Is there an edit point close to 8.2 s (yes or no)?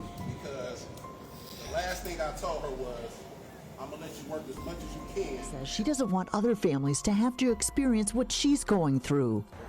no